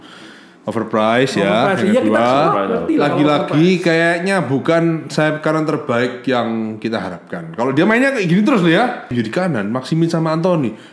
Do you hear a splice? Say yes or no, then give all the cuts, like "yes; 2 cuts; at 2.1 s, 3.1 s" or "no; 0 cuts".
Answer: yes; 1 cut; at 9.1 s